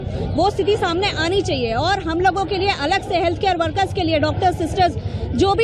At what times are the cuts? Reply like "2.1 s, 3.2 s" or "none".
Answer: none